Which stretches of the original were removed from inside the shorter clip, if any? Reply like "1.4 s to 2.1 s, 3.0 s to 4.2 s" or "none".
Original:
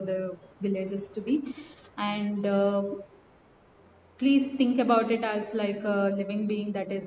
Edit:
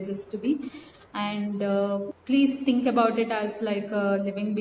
3.0 s to 4.1 s